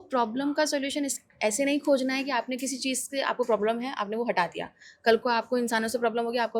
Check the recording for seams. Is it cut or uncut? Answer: uncut